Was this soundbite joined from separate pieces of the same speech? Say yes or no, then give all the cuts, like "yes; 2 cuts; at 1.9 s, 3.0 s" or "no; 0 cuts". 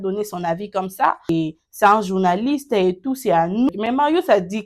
yes; 2 cuts; at 1.3 s, 3.7 s